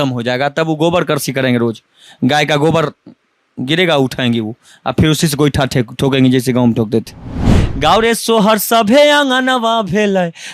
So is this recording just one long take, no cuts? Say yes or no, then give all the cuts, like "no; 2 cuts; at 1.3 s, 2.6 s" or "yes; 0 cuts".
no; 1 cut; at 7.4 s